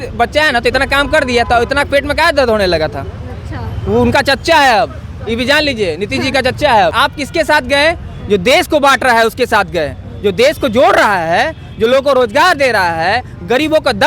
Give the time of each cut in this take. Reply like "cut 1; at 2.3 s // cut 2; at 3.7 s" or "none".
cut 1; at 7.0 s